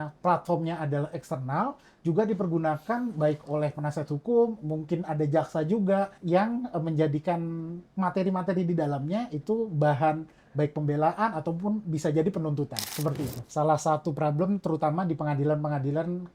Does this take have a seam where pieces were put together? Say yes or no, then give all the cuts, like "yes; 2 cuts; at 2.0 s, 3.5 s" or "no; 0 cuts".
yes; 2 cuts; at 6.2 s, 13.4 s